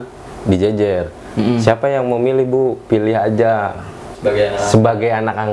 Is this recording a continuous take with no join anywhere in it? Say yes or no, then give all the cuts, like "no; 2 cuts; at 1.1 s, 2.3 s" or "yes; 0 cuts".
no; 1 cut; at 4.0 s